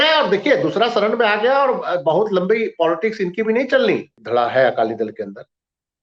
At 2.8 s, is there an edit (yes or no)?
no